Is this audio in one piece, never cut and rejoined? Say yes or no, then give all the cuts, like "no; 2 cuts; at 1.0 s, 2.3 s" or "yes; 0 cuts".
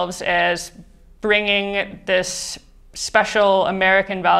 yes; 0 cuts